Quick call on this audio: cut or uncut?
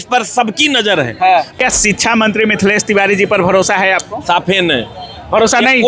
cut